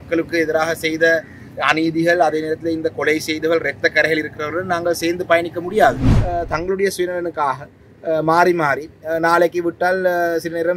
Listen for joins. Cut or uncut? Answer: cut